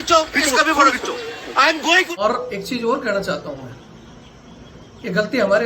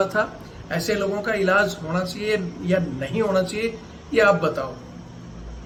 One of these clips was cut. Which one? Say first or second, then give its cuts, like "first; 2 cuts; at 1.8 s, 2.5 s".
first; 1 cut; at 2.2 s